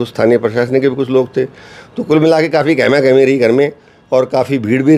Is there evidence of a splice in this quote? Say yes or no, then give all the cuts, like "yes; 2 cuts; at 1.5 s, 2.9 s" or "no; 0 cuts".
no; 0 cuts